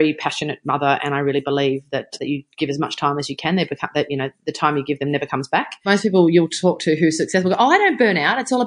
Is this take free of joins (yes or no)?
no